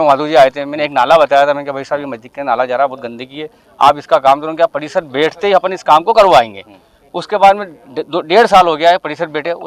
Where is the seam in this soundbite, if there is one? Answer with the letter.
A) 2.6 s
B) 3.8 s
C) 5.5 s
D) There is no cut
D